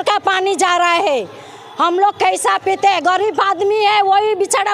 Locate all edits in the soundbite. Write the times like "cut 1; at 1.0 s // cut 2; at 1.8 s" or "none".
none